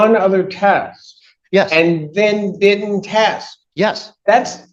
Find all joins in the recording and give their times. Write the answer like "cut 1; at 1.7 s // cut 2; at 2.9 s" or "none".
none